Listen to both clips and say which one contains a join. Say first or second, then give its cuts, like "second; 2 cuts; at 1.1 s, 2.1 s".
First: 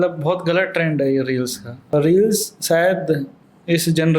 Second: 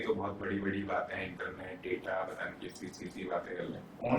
first; 1 cut; at 1.7 s